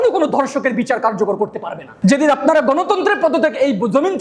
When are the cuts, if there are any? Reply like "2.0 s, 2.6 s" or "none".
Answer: 1.9 s